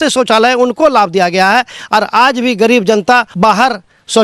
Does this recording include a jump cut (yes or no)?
yes